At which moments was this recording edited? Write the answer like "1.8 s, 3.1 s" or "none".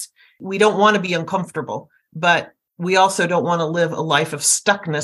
none